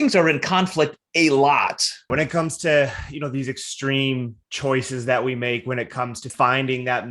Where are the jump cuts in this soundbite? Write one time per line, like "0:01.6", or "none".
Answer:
0:02.1
0:06.3